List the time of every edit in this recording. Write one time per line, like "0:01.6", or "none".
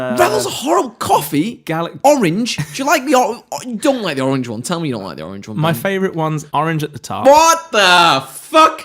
0:06.4